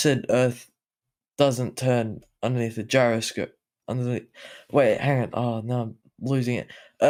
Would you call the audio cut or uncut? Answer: uncut